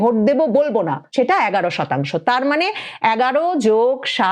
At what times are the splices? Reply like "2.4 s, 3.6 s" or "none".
1.0 s

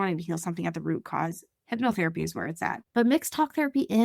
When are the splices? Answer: 2.7 s

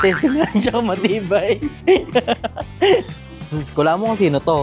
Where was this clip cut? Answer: 3.2 s

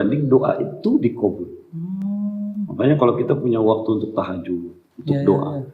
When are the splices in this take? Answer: none

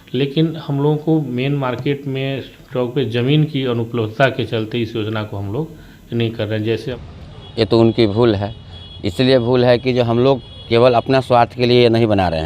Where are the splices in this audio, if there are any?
6.9 s

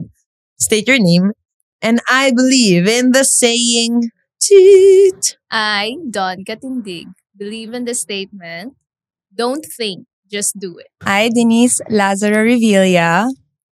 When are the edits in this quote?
11.0 s

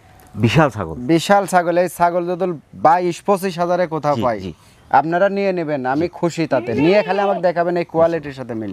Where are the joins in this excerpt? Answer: none

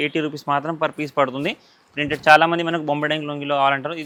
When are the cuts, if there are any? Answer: none

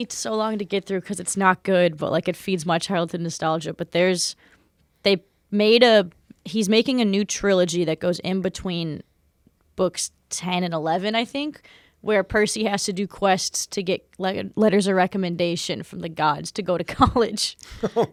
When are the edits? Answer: none

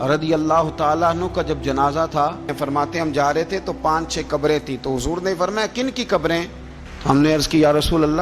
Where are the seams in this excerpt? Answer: 2.5 s

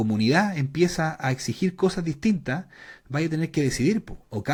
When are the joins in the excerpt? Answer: none

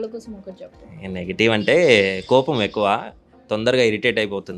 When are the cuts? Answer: none

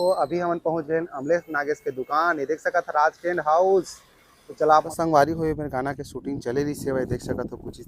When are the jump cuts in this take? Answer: 4.9 s

